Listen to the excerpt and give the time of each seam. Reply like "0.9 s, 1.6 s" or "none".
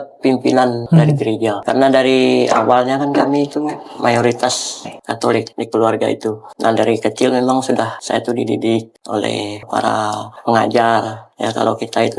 1.6 s